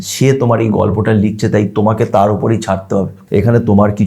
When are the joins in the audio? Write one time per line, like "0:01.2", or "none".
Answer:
0:03.2

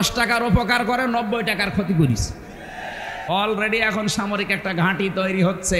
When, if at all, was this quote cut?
0:03.2

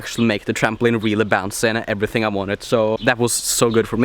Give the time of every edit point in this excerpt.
0:03.0

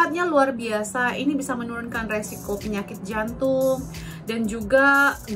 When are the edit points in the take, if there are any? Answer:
none

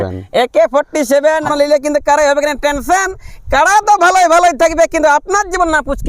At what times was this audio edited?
0:01.5

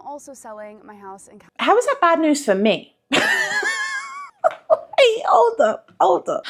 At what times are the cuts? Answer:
none

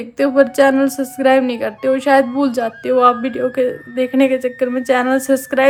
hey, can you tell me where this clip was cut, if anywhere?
none

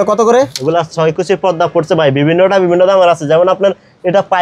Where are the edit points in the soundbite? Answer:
none

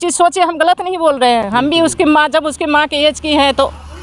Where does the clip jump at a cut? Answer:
none

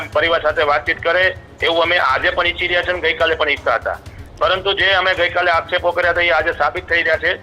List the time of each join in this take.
none

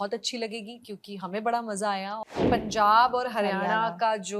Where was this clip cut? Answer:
0:02.3

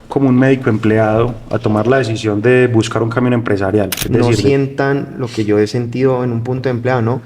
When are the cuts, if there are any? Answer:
0:04.5

